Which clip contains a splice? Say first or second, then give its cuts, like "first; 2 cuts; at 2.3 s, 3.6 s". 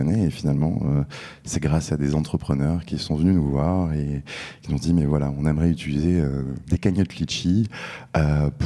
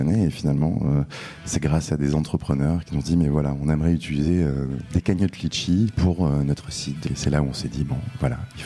second; 3 cuts; at 2.9 s, 5.9 s, 7.0 s